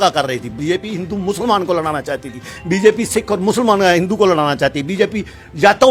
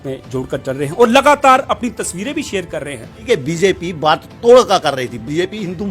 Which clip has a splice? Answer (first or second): second